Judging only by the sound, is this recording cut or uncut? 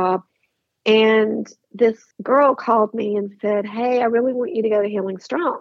cut